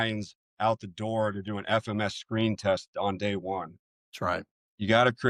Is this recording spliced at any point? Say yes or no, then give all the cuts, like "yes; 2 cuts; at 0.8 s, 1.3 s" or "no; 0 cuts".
no; 0 cuts